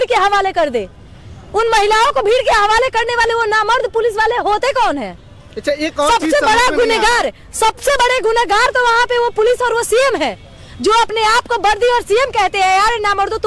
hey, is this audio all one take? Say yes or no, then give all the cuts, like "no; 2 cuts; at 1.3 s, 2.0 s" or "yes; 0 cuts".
yes; 0 cuts